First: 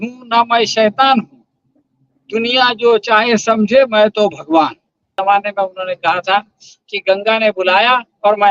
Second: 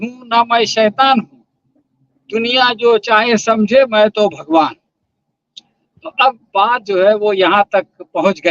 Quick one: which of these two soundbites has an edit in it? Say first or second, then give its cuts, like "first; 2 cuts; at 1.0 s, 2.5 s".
first; 1 cut; at 5.1 s